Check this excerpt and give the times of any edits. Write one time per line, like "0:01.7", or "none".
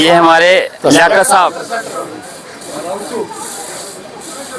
0:01.6